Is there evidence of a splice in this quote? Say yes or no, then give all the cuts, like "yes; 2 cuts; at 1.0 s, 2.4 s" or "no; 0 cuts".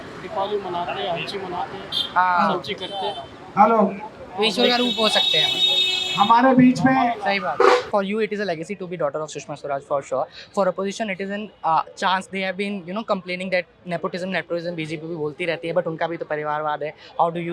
yes; 1 cut; at 7.9 s